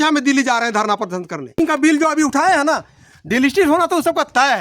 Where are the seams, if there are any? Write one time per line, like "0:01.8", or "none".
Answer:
0:01.5

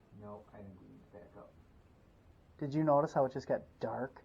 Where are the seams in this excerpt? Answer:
0:02.3

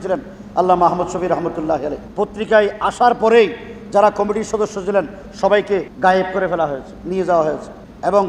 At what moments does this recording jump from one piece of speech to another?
0:02.0
0:05.9

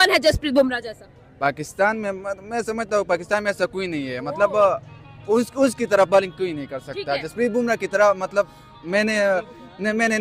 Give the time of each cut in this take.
none

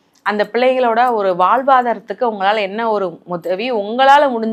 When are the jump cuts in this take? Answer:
none

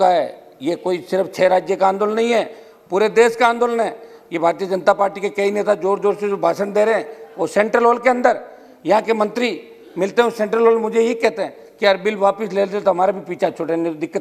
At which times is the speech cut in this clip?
none

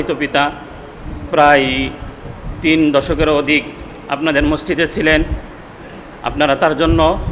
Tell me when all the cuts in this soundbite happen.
none

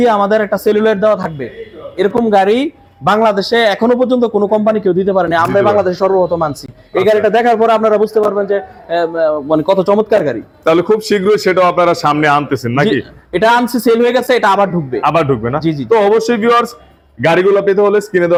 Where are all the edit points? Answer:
none

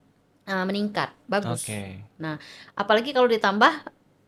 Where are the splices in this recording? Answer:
none

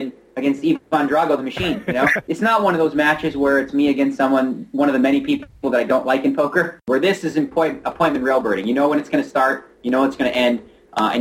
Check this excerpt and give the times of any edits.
0:02.2
0:06.8

